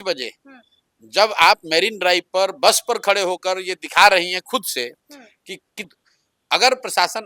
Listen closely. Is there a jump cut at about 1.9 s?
no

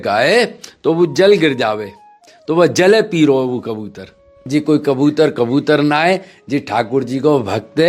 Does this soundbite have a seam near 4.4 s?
yes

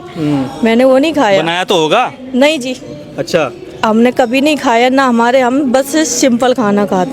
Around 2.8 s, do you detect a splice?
no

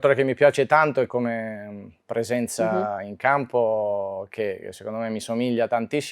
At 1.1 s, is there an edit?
yes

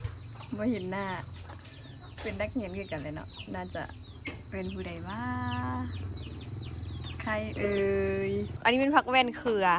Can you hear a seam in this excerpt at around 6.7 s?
no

